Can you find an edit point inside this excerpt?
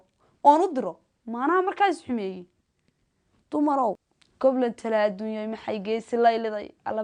yes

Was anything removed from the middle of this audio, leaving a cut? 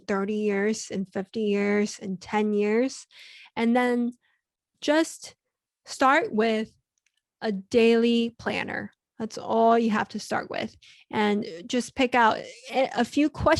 no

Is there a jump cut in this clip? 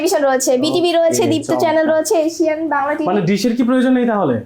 no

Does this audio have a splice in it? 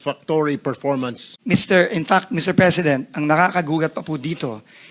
yes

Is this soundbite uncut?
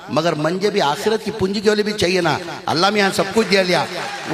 yes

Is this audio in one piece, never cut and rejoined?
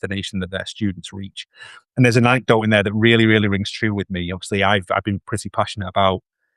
yes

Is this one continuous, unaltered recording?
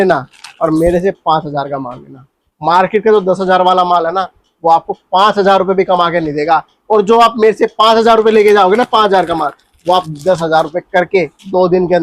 yes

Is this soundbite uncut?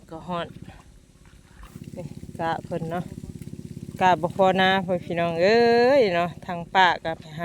no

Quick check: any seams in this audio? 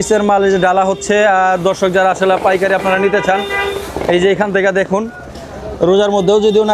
no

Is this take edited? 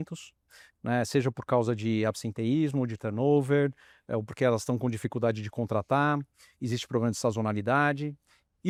no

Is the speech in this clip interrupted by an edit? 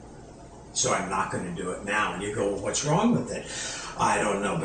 no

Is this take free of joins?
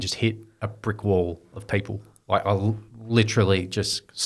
yes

